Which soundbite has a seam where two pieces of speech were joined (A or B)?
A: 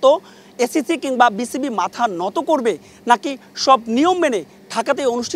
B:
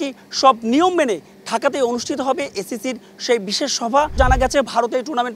B